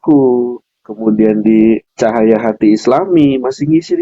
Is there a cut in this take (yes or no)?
yes